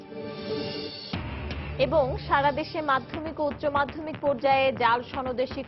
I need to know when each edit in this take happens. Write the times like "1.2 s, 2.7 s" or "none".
none